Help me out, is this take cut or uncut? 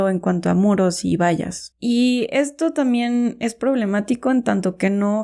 uncut